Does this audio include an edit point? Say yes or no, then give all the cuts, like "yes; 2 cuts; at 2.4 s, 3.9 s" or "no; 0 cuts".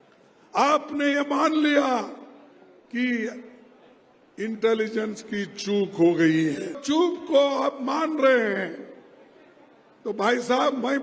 yes; 1 cut; at 6.8 s